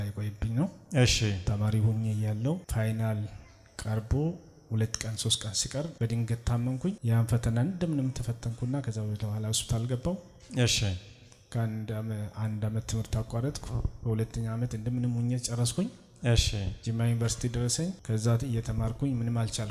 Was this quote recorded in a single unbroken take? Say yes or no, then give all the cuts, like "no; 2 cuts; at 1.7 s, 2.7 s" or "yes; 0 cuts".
yes; 0 cuts